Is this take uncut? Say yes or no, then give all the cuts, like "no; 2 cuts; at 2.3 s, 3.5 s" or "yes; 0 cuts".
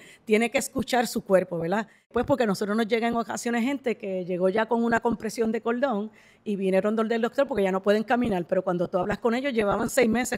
yes; 0 cuts